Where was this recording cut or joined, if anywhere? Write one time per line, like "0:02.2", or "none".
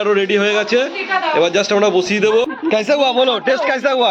0:02.5